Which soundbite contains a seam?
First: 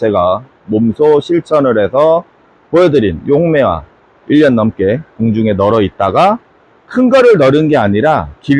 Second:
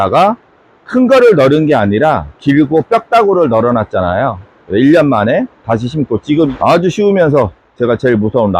second; 1 cut; at 6.5 s

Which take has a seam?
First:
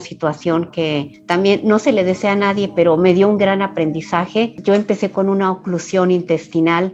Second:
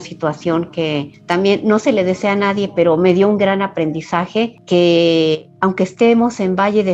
first; 1 cut; at 4.6 s

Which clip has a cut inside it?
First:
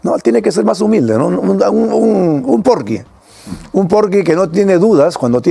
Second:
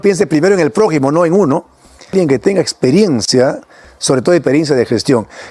second; 1 cut; at 2.1 s

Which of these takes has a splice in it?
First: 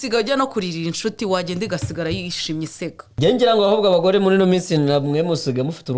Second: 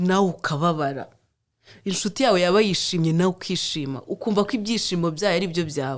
first; 1 cut; at 3.1 s

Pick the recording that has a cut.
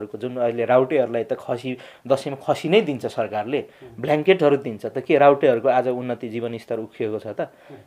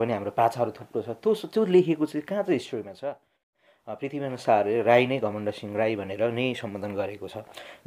second; 1 cut; at 3.6 s

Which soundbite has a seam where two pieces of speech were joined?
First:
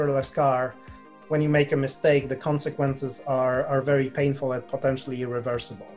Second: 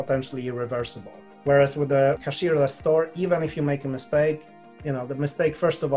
second; 1 cut; at 2.2 s

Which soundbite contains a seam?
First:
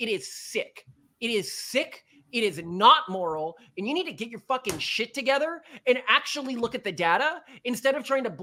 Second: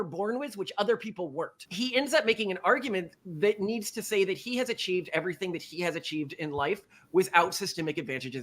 second; 1 cut; at 1.6 s

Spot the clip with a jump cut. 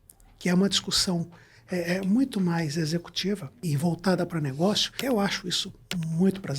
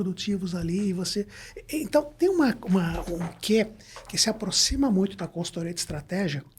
first; 2 cuts; at 3.6 s, 4.9 s

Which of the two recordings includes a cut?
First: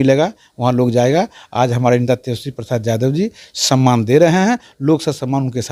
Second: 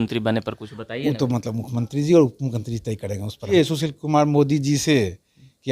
second; 1 cut; at 3.5 s

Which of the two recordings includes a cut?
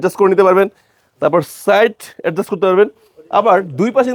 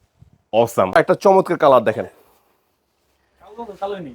second; 1 cut; at 0.9 s

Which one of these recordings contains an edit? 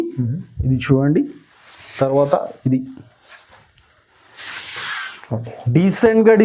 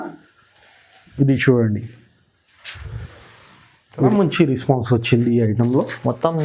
second; 1 cut; at 4.1 s

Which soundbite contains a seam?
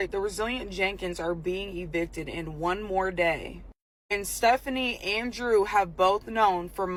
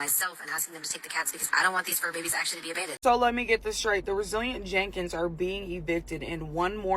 second; 1 cut; at 2.9 s

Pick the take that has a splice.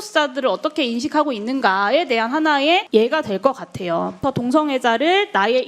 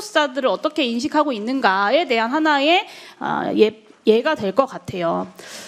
first; 2 cuts; at 2.8 s, 4.2 s

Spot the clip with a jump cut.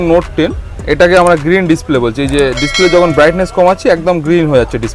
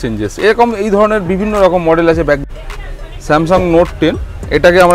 second; 1 cut; at 2.4 s

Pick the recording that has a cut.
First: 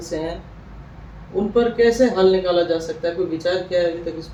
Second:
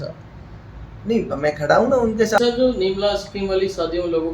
second; 1 cut; at 2.4 s

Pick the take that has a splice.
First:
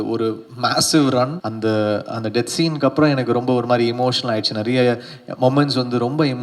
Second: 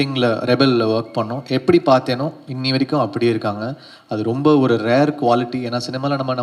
first; 1 cut; at 1.4 s

